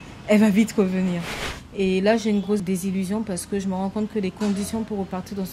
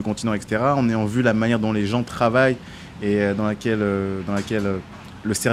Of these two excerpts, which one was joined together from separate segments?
first; 2 cuts; at 1.3 s, 2.6 s

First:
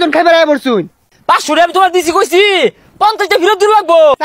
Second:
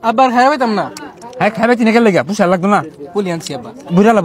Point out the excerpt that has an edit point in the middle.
first; 1 cut; at 1.1 s

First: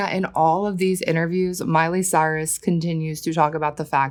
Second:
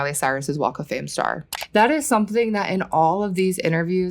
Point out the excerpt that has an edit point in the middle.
second; 1 cut; at 1.5 s

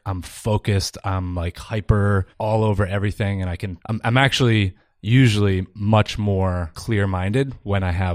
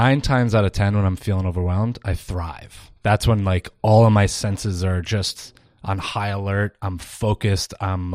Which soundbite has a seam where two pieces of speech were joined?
first; 3 cuts; at 2.3 s, 3.7 s, 6.7 s

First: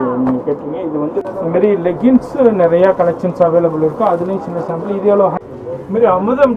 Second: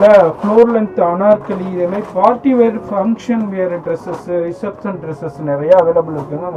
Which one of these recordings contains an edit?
first; 2 cuts; at 1.2 s, 5.4 s

